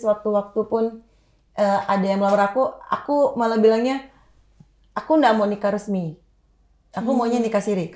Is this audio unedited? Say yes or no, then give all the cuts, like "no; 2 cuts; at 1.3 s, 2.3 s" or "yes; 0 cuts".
yes; 0 cuts